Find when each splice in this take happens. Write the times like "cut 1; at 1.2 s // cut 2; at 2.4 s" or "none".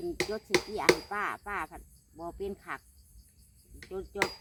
none